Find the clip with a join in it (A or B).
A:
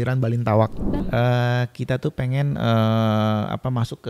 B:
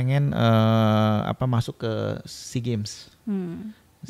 A